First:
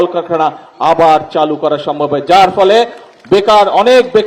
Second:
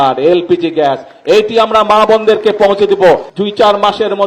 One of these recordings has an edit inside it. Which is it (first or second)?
second